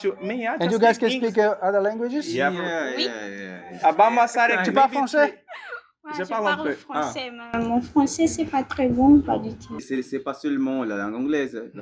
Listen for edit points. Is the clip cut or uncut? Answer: cut